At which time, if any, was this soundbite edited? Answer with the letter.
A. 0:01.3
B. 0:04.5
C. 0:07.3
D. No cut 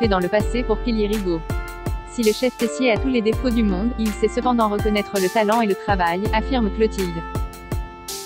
C